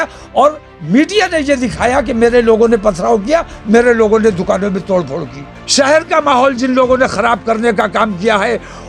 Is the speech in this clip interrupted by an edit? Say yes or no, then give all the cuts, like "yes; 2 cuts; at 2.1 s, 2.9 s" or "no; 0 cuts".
yes; 1 cut; at 5.5 s